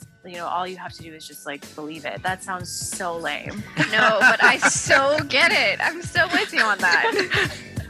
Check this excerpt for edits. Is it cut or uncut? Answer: uncut